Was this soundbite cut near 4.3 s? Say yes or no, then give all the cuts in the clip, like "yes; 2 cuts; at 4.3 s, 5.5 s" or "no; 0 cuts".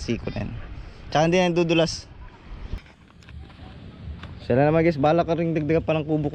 no; 1 cut; at 2.8 s